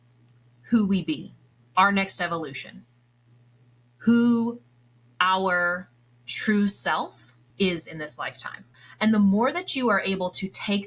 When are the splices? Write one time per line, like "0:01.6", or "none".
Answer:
0:08.7